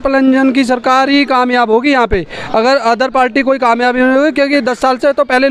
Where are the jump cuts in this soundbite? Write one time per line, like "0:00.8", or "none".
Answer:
none